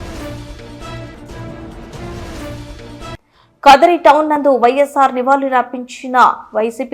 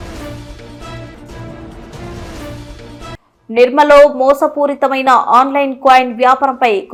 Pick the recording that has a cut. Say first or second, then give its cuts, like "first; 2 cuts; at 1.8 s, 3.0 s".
first; 1 cut; at 3.2 s